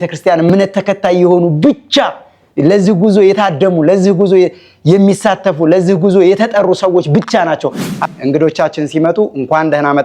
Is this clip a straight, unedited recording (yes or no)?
no